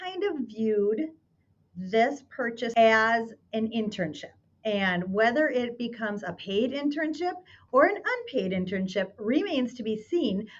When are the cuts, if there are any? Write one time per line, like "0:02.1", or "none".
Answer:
0:02.7